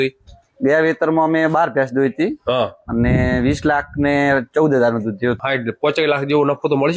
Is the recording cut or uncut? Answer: cut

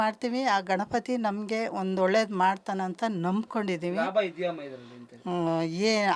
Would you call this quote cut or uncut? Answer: uncut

